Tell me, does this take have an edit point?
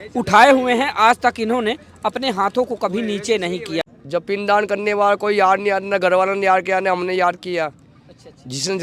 yes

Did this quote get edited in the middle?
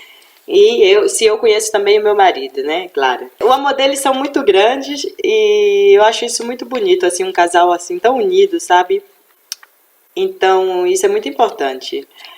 yes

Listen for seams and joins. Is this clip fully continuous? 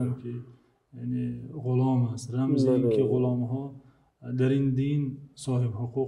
yes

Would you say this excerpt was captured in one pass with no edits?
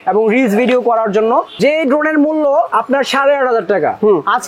no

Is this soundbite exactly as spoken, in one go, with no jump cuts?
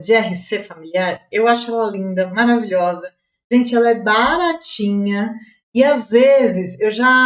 yes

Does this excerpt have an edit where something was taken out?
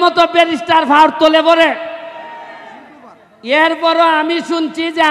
no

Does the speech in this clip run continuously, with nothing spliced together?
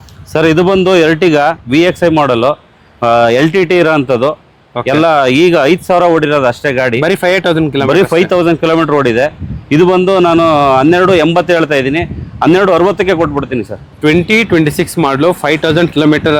yes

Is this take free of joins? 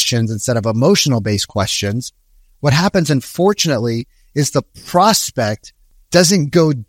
yes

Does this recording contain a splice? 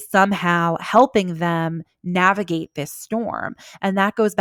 no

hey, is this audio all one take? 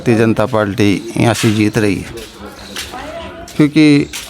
yes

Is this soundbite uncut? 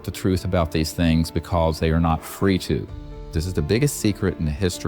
no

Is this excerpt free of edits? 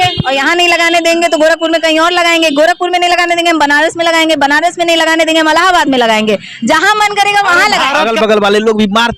no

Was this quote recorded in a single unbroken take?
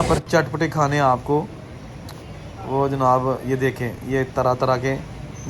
yes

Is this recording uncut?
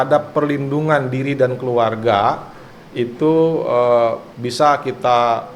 yes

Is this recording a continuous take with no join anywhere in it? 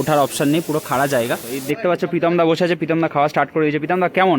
no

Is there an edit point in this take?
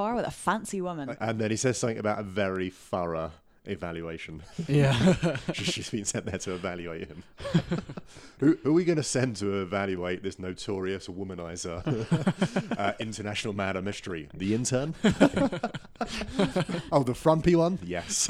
yes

